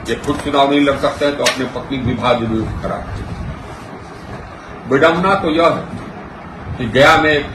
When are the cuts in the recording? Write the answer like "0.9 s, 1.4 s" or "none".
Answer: none